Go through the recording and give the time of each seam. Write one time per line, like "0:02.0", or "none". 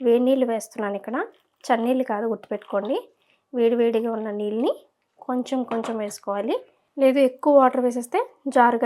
0:06.8